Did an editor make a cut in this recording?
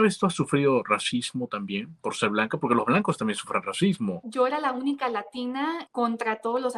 yes; 2 cuts; at 4.2 s, 5.8 s

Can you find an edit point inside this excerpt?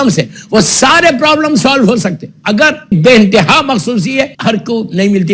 yes; 2 cuts; at 2.9 s, 4.3 s

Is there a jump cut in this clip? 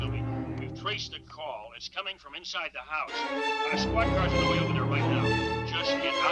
no; 0 cuts

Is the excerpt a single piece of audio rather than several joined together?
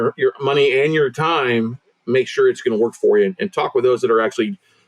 yes; 0 cuts

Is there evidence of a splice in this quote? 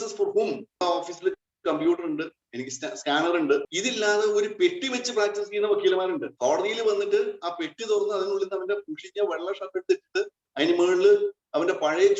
yes; 3 cuts; at 0.8 s, 3.7 s, 6.3 s

